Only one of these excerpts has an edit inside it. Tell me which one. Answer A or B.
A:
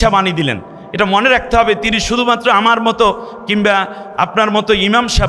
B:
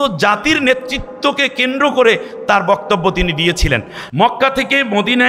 B